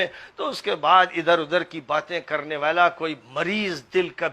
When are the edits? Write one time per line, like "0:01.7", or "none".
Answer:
none